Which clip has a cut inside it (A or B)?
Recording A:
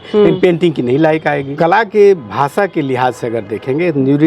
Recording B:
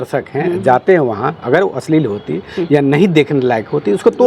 A